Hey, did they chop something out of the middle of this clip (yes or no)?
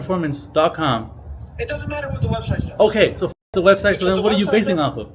no